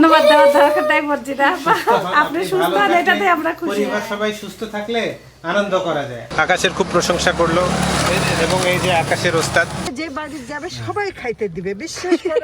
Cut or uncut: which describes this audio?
cut